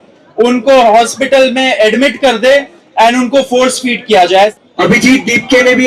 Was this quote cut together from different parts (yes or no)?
yes